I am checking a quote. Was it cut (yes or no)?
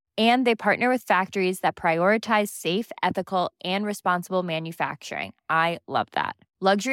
no